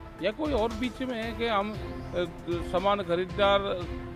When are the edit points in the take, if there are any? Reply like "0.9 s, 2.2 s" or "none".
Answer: none